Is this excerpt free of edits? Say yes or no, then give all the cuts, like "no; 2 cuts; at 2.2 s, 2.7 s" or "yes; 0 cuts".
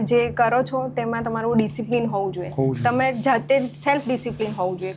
yes; 0 cuts